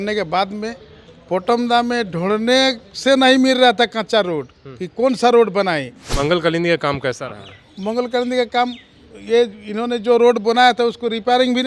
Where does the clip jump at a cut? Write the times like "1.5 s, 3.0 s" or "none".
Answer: none